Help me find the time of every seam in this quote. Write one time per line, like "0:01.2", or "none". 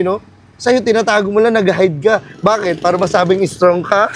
none